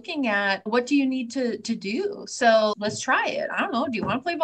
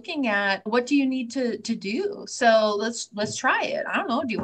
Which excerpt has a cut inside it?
first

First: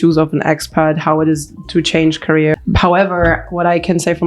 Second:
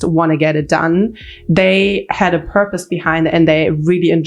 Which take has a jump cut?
first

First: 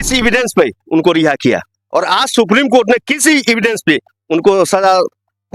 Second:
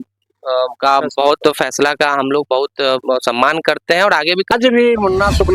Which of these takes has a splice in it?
second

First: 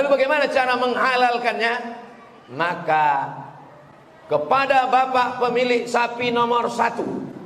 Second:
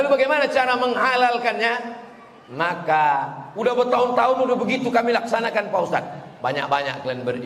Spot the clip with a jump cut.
second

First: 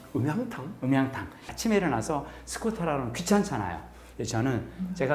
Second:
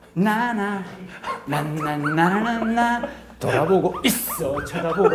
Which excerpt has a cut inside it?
first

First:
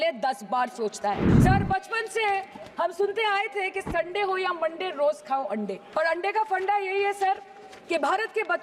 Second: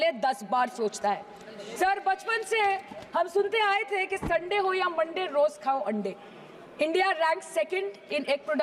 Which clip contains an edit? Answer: first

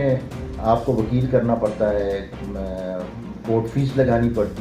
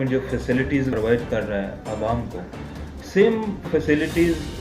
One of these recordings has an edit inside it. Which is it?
second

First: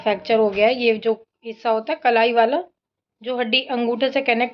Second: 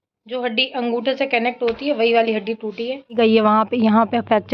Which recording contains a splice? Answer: second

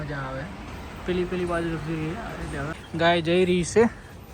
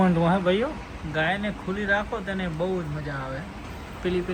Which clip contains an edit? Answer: first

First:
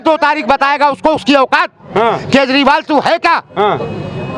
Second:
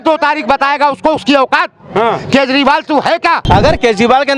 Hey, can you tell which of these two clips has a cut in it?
second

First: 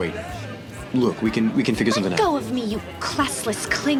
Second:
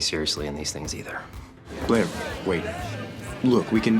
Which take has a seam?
second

